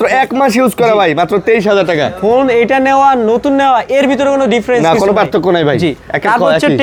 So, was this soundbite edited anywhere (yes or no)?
no